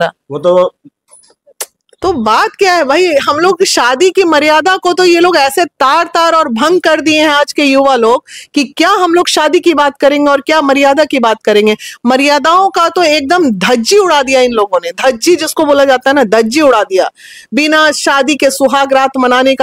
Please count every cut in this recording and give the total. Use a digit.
0